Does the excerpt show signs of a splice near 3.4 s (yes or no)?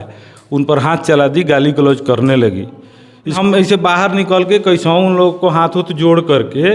yes